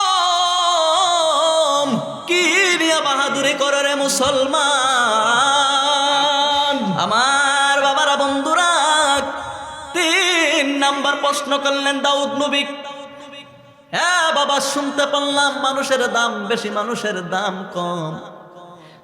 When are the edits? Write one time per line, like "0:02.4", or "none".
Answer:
0:07.0